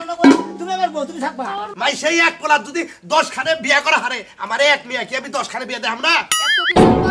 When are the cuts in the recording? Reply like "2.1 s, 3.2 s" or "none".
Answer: 1.7 s